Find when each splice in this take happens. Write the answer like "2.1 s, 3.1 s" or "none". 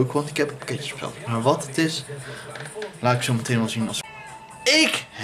4.0 s